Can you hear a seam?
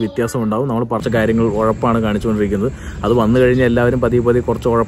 yes; 1 cut; at 1.0 s

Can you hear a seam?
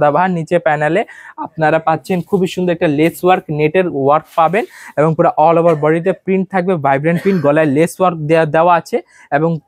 no; 0 cuts

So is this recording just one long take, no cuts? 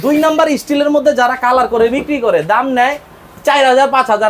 yes; 0 cuts

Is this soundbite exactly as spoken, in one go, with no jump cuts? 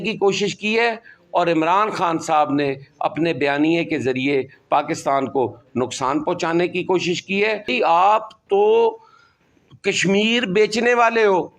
no; 1 cut; at 7.7 s

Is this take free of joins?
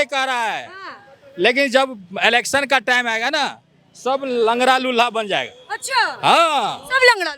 yes; 0 cuts

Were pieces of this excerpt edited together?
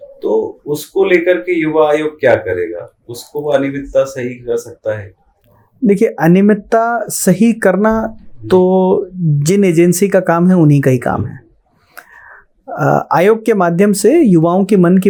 no; 0 cuts

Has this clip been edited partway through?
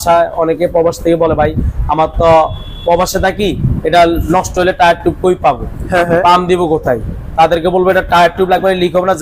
no; 0 cuts

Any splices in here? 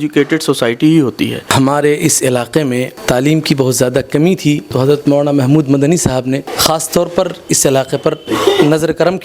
yes; 5 cuts; at 1.5 s, 2.9 s, 4.7 s, 6.5 s, 8.2 s

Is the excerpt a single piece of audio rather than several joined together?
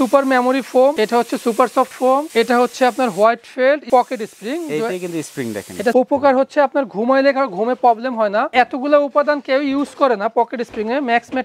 no; 3 cuts; at 3.8 s, 5.9 s, 8.5 s

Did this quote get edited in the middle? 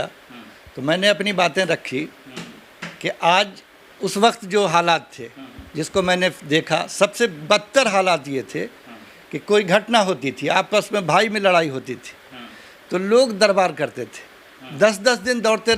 no; 0 cuts

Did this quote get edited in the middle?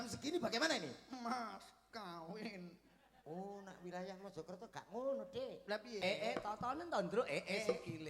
yes; 1 cut; at 6.0 s

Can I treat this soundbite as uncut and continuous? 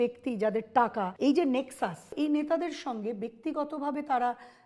no; 2 cuts; at 1.1 s, 2.1 s

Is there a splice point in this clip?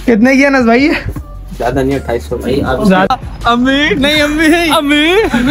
yes; 1 cut; at 3.1 s

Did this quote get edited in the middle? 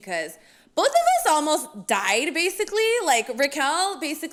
no; 0 cuts

